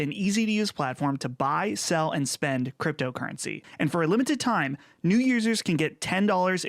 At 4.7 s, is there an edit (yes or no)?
no